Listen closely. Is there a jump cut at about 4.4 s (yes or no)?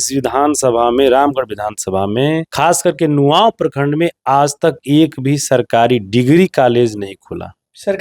no